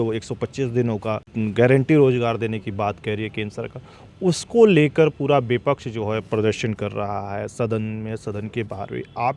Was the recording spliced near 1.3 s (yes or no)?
yes